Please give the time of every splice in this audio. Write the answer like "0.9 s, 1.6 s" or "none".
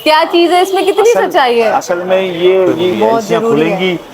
2.9 s